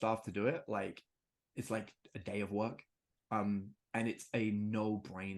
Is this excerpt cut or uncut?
uncut